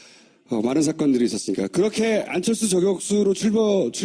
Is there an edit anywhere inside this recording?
yes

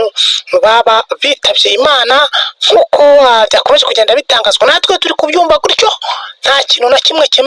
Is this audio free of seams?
yes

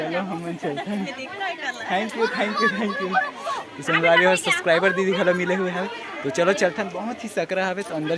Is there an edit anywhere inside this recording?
no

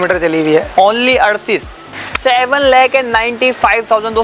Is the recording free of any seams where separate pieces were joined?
no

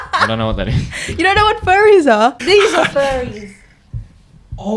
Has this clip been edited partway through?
yes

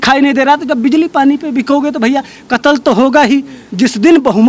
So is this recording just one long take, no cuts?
no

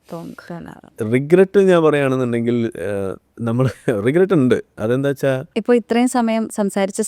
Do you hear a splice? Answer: yes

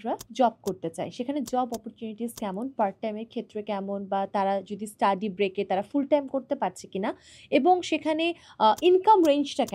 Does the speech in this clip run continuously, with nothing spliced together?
yes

